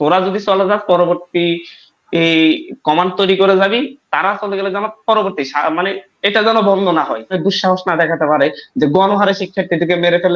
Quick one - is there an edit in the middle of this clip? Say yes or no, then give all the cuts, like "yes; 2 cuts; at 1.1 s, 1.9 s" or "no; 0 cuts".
yes; 1 cut; at 7.4 s